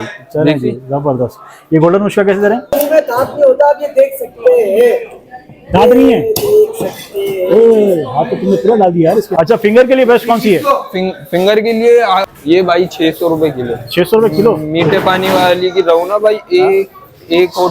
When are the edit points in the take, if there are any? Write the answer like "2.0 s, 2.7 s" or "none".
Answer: 2.7 s, 9.3 s, 12.3 s

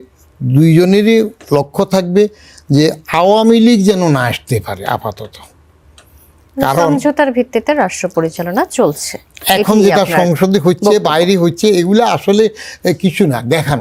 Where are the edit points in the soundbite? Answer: none

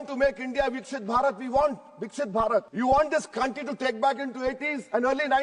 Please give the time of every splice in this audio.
2.7 s

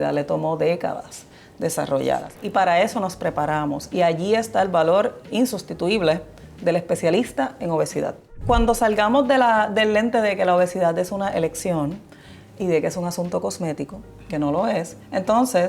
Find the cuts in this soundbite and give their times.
2.3 s, 5.2 s, 8.3 s

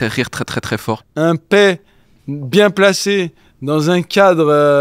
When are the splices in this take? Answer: 1.1 s

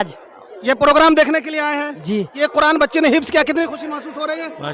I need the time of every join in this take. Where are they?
2.3 s

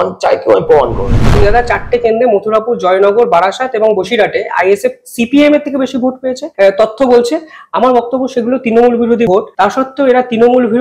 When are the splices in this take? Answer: 1.4 s, 6.4 s, 9.3 s

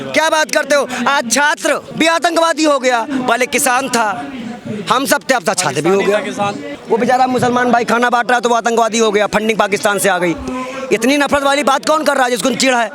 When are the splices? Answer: 6.7 s

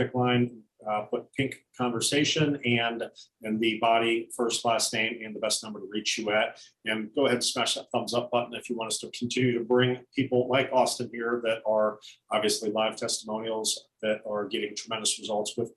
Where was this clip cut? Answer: none

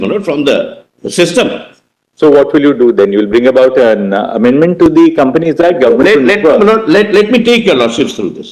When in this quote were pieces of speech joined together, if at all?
none

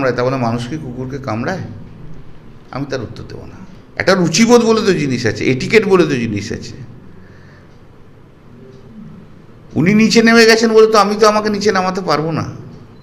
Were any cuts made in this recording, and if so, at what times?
3.4 s

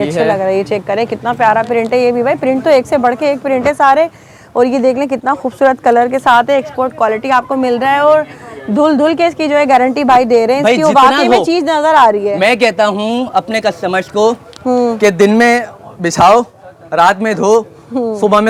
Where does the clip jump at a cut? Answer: none

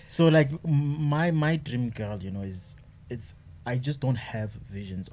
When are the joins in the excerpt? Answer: none

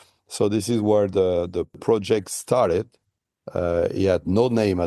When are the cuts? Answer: 1.8 s

